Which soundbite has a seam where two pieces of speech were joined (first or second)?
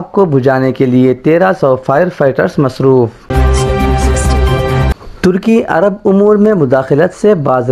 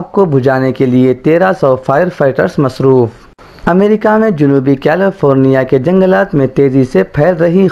first